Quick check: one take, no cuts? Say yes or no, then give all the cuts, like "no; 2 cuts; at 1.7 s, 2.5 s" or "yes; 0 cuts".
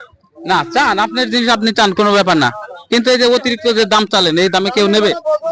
yes; 0 cuts